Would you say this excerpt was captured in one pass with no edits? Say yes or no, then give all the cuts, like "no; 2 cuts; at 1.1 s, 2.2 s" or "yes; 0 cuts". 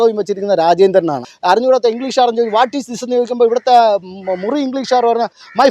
no; 1 cut; at 1.3 s